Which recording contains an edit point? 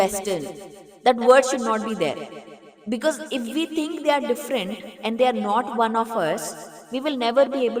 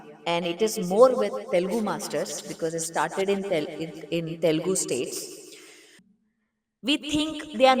second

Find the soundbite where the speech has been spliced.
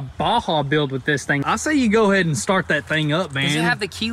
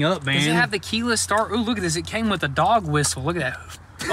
first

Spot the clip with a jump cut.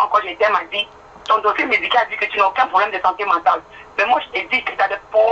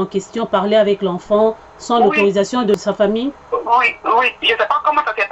second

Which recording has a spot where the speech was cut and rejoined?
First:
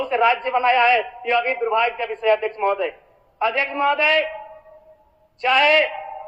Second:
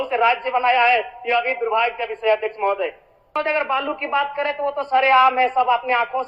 second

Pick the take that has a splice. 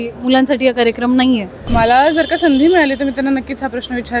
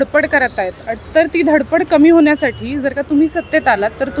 first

